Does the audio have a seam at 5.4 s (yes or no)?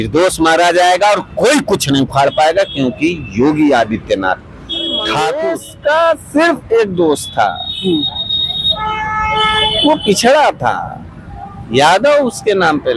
yes